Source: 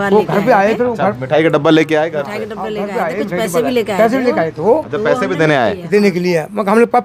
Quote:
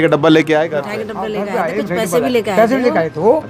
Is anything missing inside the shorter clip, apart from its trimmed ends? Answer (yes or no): no